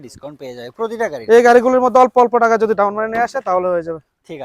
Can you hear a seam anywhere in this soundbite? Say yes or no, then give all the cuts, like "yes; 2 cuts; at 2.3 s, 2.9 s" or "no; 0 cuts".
no; 0 cuts